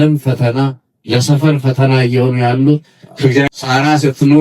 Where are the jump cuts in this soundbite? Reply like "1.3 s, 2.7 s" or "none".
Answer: 3.5 s